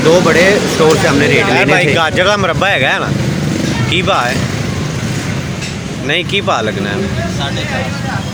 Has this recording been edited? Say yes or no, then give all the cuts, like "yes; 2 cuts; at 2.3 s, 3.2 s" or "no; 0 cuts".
no; 0 cuts